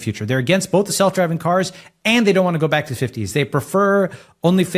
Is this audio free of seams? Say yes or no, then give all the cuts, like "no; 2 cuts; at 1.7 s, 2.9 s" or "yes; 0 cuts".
yes; 0 cuts